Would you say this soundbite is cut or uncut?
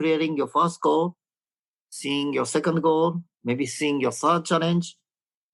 uncut